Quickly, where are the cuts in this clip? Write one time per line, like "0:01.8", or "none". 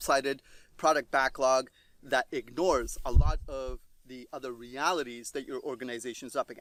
none